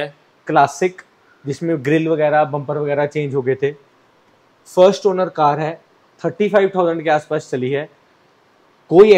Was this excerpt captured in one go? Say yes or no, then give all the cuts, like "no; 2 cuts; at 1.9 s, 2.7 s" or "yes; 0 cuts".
yes; 0 cuts